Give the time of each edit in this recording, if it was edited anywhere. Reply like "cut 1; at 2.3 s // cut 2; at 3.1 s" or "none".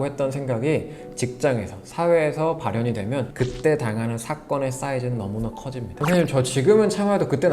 cut 1; at 5.9 s